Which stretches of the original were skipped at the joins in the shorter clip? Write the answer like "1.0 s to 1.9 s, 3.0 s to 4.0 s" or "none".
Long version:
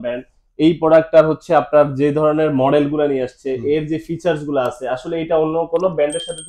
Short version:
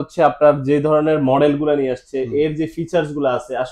none